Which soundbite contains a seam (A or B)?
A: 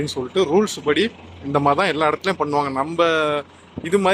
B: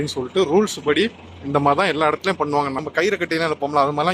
B